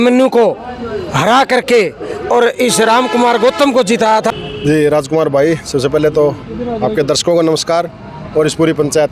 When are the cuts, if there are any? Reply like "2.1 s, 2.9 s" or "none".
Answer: 4.3 s